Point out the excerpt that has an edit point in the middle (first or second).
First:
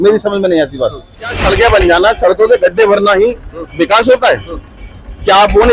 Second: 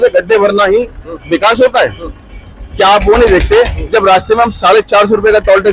first